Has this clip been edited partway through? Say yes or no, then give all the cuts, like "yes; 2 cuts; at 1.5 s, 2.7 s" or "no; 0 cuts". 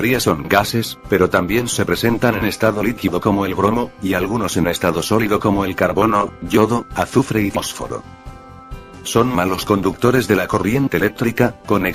yes; 1 cut; at 6.4 s